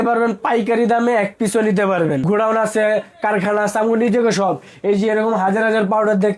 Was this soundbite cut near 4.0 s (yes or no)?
no